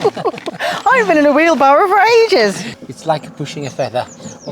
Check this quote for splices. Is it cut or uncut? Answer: cut